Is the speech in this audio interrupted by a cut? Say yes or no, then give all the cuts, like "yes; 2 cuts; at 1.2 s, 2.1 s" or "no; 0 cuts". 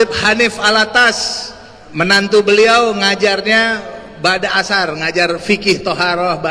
no; 0 cuts